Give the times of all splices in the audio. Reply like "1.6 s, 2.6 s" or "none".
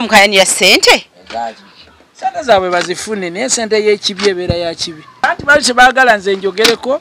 5.2 s